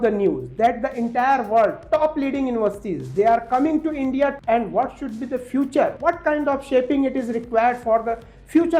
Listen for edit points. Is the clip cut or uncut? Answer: cut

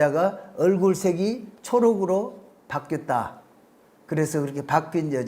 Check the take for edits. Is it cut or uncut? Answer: uncut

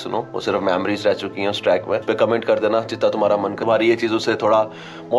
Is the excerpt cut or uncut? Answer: cut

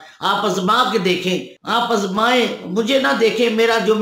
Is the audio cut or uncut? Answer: uncut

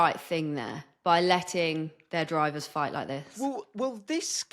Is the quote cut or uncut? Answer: uncut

